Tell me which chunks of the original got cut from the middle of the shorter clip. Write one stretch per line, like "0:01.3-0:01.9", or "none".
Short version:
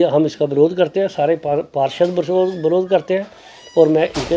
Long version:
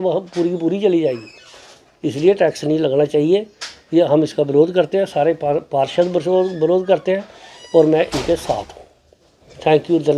none

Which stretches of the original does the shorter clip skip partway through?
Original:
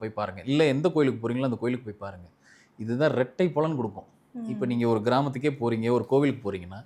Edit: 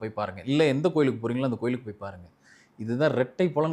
none

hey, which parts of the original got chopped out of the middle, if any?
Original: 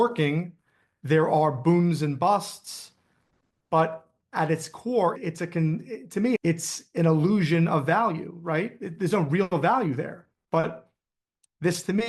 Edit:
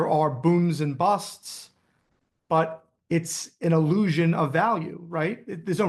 0:04.3-0:06.4

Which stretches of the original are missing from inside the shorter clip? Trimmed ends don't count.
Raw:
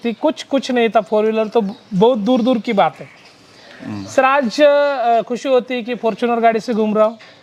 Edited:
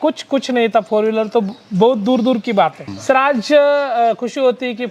0:03.1-0:04.0

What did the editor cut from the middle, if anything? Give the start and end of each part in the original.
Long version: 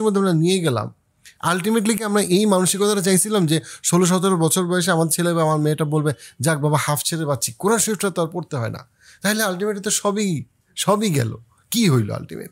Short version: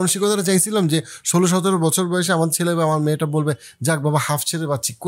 none

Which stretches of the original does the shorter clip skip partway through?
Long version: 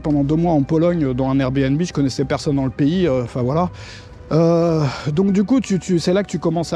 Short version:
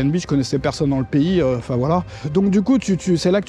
0:03.8-0:05.0

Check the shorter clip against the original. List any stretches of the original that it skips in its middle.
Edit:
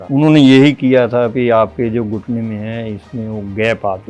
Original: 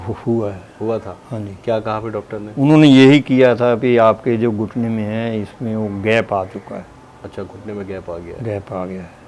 none

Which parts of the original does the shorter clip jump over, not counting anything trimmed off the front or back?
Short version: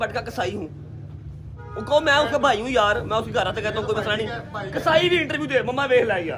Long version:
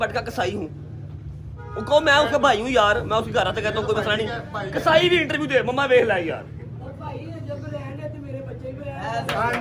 none

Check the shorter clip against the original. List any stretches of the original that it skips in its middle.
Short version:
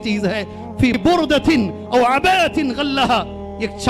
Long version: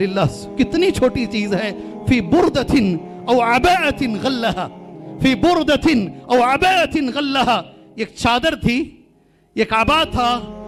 0:02.3-0:05.4

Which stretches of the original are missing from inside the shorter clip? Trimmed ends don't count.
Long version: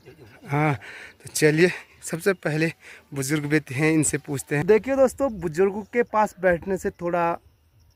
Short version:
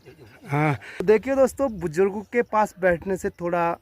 0:01.0-0:04.6

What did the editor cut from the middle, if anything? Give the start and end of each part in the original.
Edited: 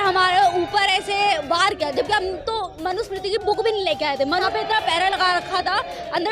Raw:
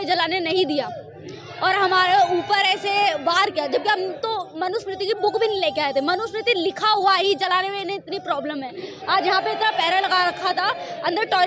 0:06.2-0:09.4

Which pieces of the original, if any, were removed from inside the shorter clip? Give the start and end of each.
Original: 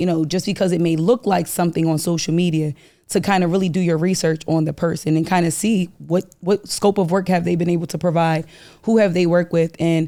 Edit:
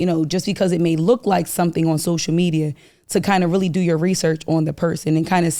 none

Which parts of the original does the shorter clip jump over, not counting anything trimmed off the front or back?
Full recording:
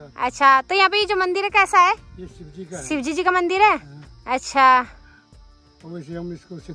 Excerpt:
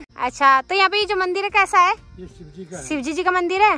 none

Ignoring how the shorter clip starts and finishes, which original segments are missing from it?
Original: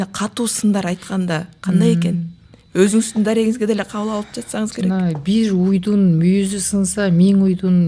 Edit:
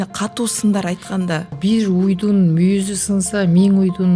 0:01.5-0:05.2

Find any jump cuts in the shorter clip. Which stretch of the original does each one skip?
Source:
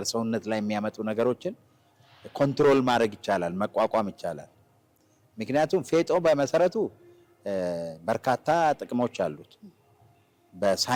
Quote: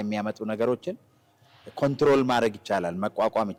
none

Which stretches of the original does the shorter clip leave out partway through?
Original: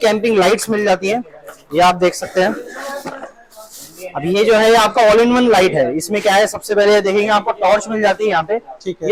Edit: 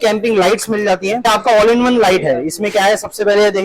0:01.3-0:04.8

